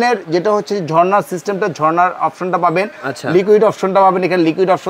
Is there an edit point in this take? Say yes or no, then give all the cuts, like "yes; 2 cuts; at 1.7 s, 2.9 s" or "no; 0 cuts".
no; 0 cuts